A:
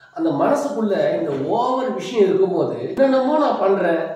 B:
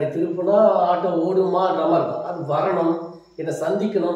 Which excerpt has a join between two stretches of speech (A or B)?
A